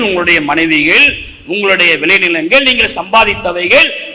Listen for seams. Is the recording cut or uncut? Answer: uncut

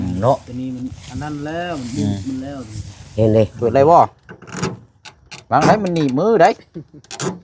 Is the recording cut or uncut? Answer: cut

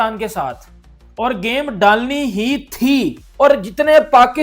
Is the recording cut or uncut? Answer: cut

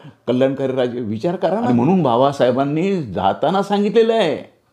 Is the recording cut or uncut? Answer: cut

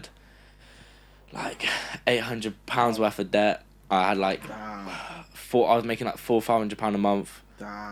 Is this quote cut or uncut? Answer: uncut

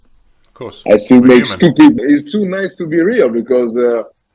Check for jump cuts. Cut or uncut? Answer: cut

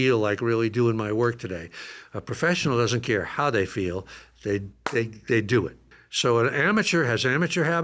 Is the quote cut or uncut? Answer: cut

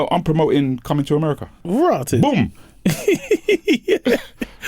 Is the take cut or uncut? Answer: cut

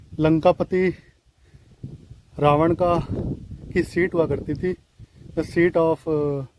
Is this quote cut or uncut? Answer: uncut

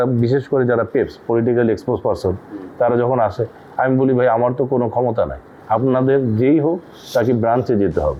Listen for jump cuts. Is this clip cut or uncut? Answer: uncut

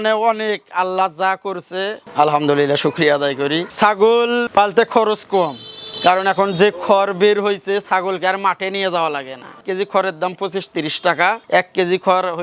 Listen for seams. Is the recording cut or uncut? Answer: cut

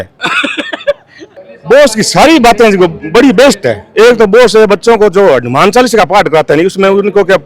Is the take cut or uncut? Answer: cut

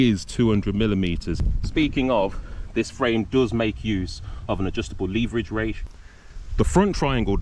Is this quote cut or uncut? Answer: cut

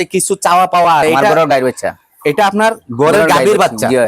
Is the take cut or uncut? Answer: cut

